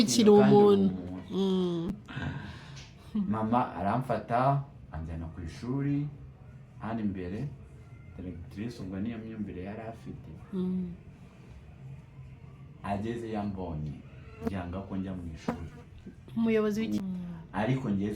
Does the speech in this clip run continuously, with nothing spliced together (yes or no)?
no